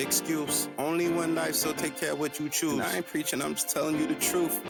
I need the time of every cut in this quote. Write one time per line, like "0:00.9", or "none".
none